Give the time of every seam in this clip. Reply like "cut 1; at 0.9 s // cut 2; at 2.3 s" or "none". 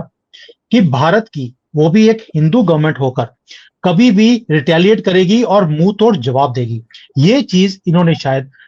none